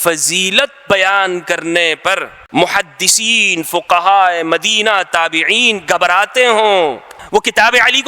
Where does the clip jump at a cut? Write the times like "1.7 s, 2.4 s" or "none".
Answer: 2.3 s, 7.1 s